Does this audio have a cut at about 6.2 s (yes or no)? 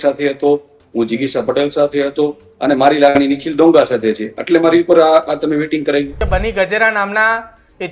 yes